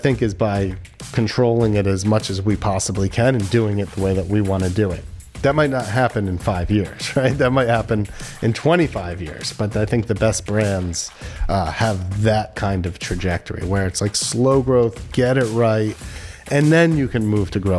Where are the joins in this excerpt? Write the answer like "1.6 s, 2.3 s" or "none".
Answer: none